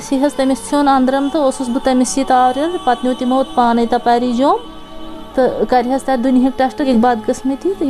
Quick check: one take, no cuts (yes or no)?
no